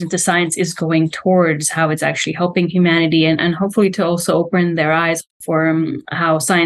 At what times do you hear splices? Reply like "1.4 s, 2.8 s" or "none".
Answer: 5.2 s